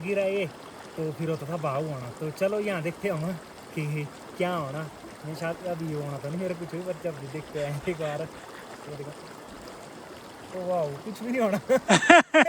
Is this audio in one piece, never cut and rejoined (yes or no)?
yes